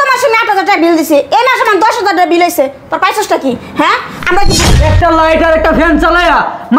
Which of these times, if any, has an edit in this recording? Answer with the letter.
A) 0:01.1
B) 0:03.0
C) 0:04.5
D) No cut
C